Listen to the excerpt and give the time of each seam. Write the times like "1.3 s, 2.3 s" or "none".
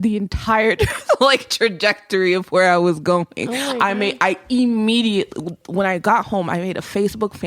none